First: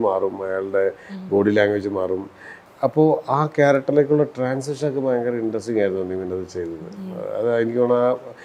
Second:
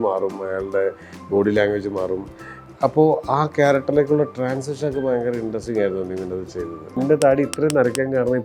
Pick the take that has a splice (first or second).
second